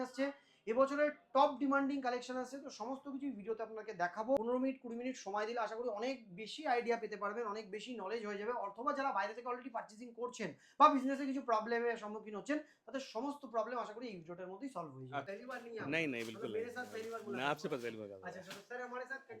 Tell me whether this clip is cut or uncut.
cut